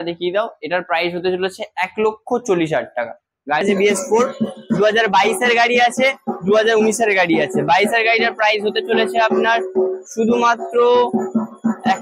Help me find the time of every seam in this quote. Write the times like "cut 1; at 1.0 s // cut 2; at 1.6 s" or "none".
cut 1; at 3.6 s